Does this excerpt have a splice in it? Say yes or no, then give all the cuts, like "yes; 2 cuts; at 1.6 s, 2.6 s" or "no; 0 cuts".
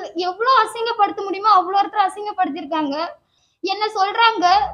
yes; 1 cut; at 3.4 s